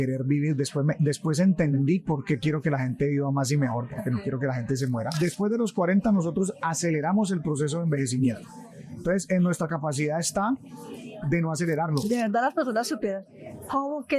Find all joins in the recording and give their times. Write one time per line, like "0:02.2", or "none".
0:05.1
0:12.1